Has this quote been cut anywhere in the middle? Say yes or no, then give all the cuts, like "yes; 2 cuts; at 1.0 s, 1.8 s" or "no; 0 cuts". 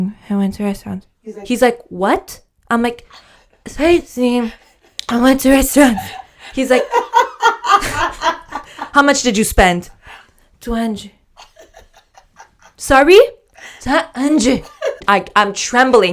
yes; 1 cut; at 15.0 s